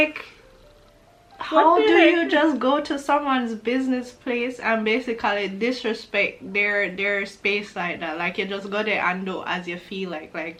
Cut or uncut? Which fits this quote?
uncut